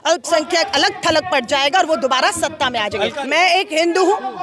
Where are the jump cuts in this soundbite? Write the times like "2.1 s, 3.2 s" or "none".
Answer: 3.2 s